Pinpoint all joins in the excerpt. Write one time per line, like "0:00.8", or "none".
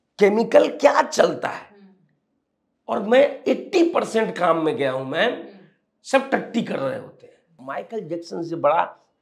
0:07.1